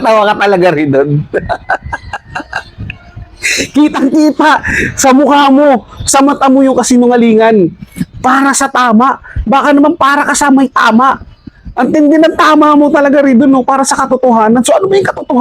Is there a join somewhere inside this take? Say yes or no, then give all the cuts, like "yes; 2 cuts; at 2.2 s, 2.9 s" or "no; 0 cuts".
no; 0 cuts